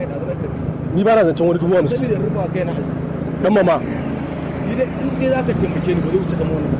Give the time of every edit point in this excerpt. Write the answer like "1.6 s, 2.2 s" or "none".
none